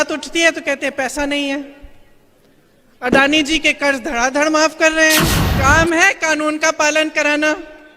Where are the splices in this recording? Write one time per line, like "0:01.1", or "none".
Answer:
0:05.4

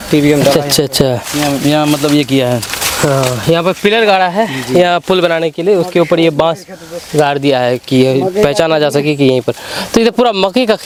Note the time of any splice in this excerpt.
none

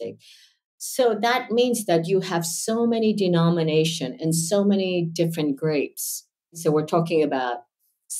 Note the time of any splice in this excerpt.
0:06.6

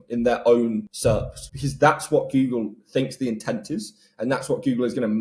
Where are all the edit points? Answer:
0:01.3

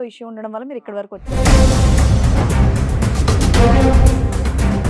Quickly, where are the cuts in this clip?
0:01.3

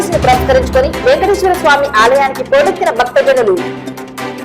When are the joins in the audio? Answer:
none

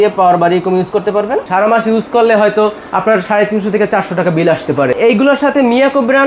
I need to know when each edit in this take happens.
0:01.5
0:04.9

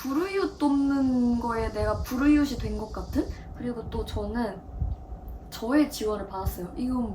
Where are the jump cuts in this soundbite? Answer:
0:03.4

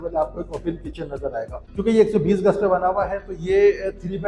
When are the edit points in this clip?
0:01.6

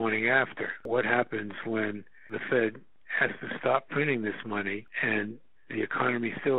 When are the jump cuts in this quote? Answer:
0:00.8
0:02.4
0:05.2

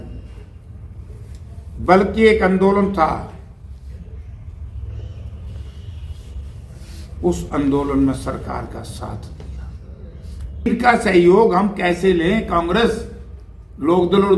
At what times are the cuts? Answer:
0:10.7

